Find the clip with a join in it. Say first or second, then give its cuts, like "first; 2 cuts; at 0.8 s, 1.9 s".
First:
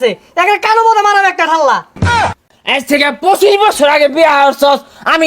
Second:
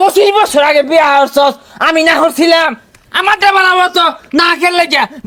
first; 1 cut; at 2.4 s